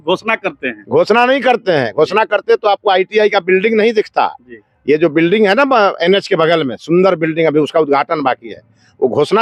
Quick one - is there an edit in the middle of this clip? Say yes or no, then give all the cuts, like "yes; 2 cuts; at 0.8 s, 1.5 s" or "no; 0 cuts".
no; 0 cuts